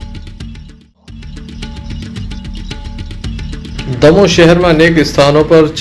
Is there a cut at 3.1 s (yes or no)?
no